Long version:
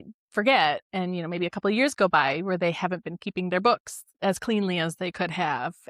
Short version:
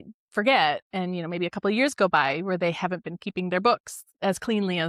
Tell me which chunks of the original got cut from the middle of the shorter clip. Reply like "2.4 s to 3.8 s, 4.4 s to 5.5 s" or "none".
none